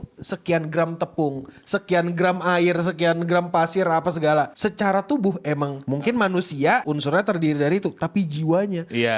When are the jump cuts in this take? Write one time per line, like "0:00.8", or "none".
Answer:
0:05.8
0:06.9